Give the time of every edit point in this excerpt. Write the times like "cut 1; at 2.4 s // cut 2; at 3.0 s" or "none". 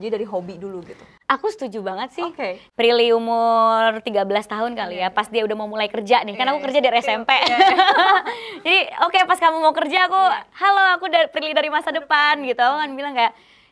cut 1; at 2.6 s